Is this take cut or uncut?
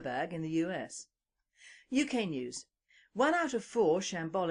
uncut